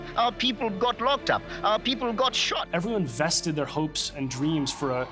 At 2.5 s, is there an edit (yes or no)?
yes